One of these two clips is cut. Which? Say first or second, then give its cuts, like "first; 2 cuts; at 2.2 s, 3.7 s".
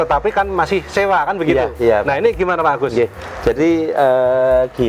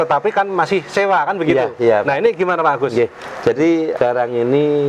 second; 1 cut; at 3.9 s